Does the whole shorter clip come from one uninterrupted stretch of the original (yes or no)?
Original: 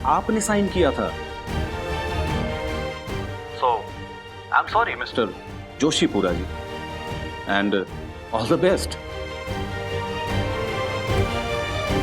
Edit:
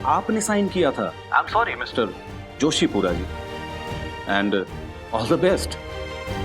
no